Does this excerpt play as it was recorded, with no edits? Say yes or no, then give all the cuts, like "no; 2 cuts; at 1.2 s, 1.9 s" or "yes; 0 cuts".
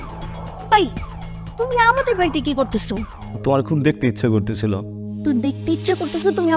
yes; 0 cuts